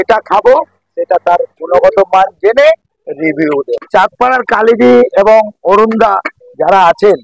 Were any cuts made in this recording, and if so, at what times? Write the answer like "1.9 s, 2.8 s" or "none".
3.7 s